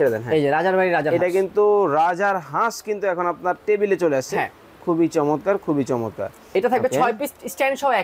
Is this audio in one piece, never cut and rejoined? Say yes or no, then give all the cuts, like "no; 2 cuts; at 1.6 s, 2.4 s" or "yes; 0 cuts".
yes; 0 cuts